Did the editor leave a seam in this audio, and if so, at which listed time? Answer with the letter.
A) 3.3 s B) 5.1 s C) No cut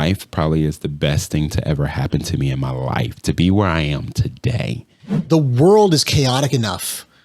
B